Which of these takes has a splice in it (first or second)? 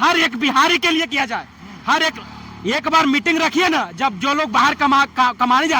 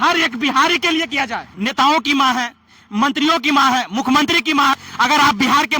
second